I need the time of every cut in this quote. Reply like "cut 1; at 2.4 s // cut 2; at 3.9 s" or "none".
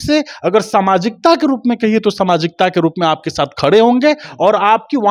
none